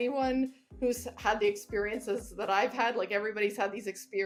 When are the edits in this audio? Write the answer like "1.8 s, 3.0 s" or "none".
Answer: none